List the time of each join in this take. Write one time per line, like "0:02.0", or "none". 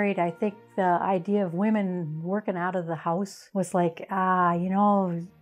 0:03.4